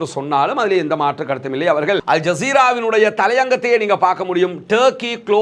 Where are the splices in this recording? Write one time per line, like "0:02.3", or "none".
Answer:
0:02.0

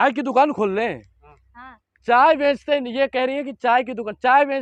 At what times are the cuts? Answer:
none

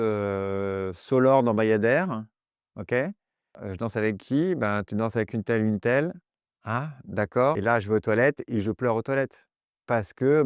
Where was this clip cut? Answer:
0:03.6
0:07.6

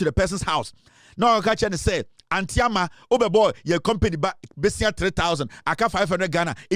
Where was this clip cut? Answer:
none

